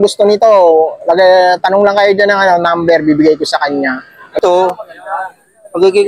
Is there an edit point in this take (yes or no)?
yes